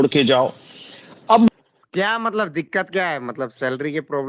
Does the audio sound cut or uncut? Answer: cut